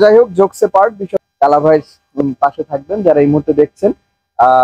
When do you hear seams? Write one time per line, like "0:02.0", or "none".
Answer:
0:01.1